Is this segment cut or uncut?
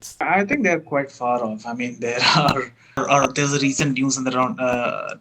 cut